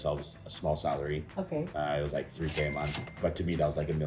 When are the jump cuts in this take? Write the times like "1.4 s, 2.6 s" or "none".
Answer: 3.2 s